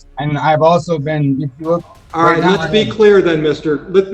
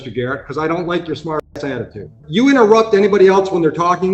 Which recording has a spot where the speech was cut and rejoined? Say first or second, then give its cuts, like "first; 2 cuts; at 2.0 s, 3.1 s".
second; 1 cut; at 2.1 s